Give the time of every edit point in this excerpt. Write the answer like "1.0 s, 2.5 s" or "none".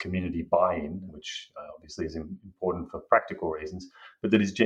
1.1 s